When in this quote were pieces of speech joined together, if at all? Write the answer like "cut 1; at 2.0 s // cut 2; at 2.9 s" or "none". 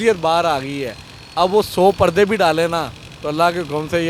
none